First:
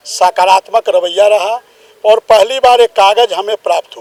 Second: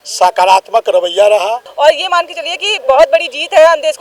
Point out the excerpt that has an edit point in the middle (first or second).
second